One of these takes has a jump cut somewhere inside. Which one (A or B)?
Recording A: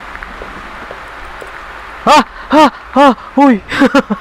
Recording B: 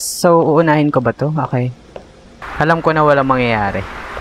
B